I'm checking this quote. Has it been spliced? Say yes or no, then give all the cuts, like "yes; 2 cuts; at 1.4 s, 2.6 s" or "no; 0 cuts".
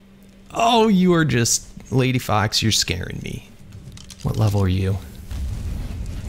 yes; 1 cut; at 3.5 s